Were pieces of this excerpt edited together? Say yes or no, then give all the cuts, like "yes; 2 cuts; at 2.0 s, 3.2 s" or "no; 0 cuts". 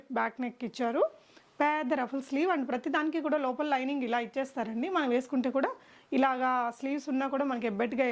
no; 0 cuts